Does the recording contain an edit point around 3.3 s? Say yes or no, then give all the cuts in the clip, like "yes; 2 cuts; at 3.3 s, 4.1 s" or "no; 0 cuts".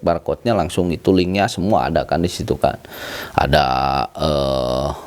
no; 0 cuts